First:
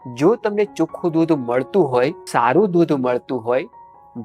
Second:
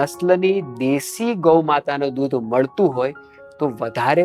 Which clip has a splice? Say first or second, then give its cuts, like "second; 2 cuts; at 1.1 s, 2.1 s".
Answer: first; 1 cut; at 2.2 s